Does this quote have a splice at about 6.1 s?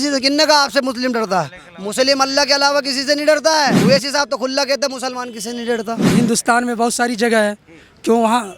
yes; 2 cuts; at 3.8 s, 6.1 s

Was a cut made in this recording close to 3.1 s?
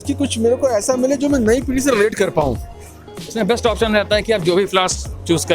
yes; 1 cut; at 3.1 s

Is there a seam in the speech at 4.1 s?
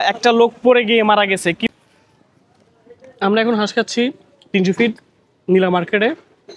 no; 1 cut; at 1.7 s

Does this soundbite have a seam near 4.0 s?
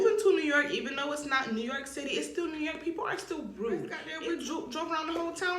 yes; 1 cut; at 4.0 s

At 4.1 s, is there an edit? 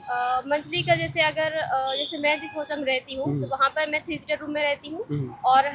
no; 0 cuts

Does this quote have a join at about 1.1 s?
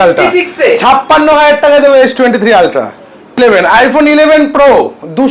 no; 1 cut; at 3.4 s

